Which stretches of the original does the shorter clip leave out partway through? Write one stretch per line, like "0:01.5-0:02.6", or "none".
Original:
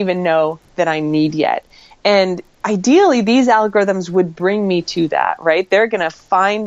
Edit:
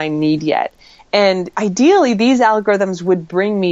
0:02.4-0:02.6